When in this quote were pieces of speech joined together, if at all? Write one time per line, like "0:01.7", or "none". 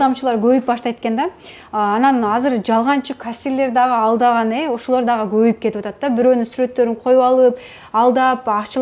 none